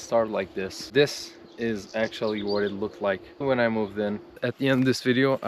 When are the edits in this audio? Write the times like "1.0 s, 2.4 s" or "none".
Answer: 0.9 s, 3.4 s, 4.4 s